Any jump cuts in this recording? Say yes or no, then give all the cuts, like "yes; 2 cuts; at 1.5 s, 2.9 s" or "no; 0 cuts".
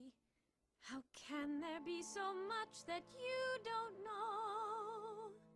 no; 0 cuts